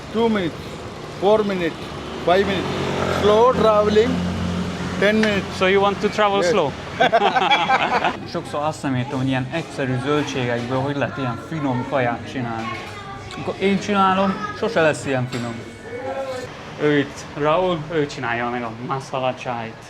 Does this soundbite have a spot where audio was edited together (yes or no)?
yes